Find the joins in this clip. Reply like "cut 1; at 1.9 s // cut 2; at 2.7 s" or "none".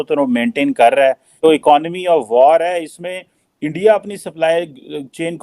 cut 1; at 1.3 s